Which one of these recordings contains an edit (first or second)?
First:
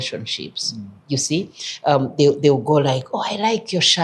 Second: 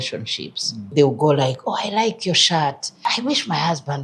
second